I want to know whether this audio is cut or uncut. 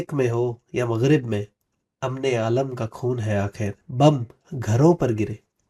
cut